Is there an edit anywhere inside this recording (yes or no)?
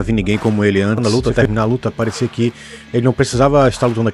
yes